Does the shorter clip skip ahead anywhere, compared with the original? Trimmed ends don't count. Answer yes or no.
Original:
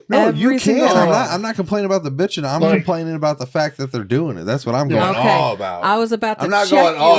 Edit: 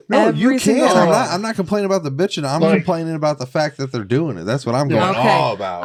no